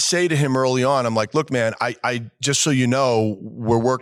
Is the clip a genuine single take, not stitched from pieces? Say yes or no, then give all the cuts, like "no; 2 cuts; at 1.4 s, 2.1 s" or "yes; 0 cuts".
yes; 0 cuts